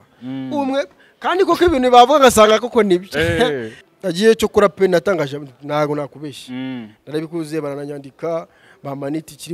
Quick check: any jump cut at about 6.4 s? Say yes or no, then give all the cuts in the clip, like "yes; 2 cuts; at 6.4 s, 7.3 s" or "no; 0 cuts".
no; 1 cut; at 3.8 s